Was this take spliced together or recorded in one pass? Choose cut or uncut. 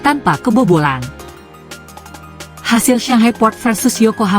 cut